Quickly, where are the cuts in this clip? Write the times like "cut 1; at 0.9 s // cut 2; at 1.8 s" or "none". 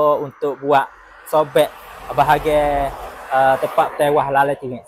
none

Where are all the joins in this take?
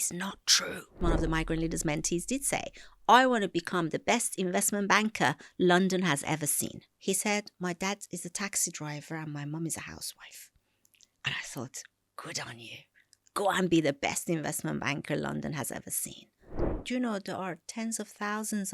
cut 1; at 1.0 s // cut 2; at 6.9 s // cut 3; at 16.7 s

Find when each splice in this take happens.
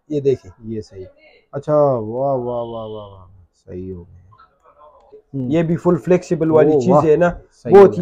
cut 1; at 5.2 s

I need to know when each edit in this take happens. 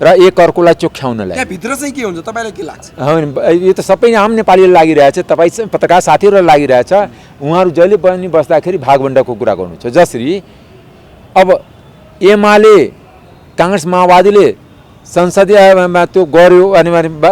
none

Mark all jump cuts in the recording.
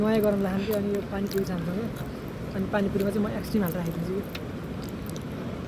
cut 1; at 4.3 s

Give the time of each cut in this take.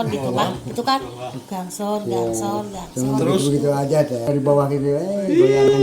cut 1; at 4.3 s

